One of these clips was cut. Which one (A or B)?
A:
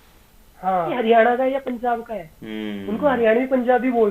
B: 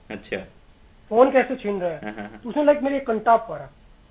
A